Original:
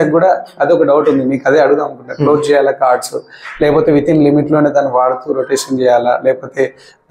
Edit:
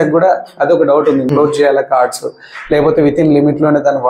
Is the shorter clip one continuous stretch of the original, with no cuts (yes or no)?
no